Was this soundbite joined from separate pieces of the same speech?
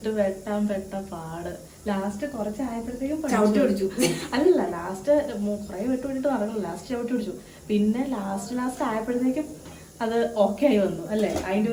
no; 0 cuts

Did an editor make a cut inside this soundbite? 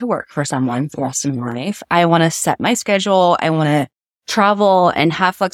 no; 0 cuts

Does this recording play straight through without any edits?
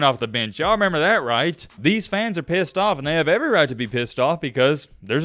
no; 1 cut; at 1.7 s

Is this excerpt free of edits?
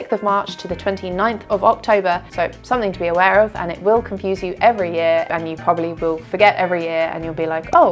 no; 2 cuts; at 2.2 s, 5.3 s

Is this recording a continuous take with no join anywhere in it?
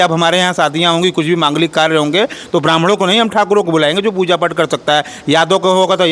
yes; 0 cuts

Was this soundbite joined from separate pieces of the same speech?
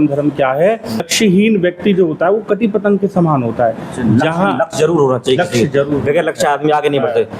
yes; 1 cut; at 1.1 s

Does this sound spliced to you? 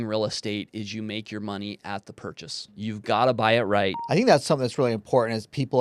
yes; 2 cuts; at 2.8 s, 4.0 s

